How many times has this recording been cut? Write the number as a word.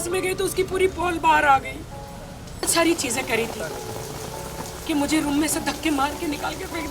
one